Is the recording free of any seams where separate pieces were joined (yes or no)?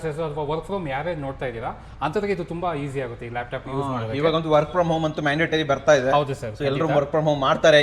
yes